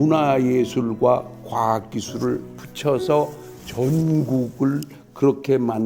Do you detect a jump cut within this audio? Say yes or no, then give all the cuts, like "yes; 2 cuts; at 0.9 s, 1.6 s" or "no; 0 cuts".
no; 0 cuts